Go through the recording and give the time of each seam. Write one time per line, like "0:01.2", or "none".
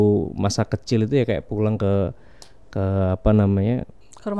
none